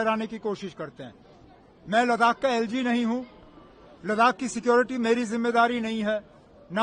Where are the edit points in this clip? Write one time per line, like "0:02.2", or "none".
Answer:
none